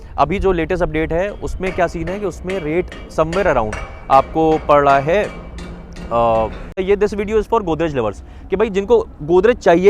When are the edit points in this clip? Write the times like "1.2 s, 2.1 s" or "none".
6.8 s